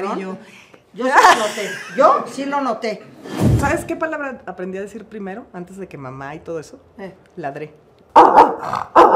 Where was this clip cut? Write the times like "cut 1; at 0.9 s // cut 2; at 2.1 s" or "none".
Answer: cut 1; at 3.6 s // cut 2; at 7.9 s